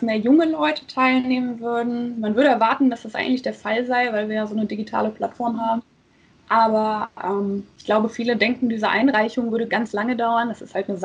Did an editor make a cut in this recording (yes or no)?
no